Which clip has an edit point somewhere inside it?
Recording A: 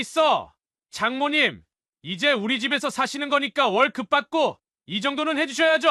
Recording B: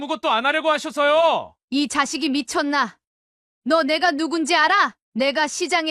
B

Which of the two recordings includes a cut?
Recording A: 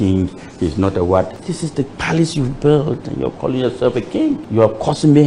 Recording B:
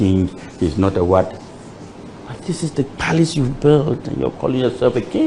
A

